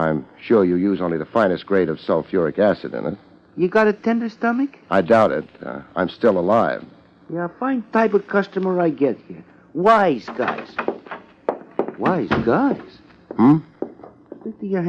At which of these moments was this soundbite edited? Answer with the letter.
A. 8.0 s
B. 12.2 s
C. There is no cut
C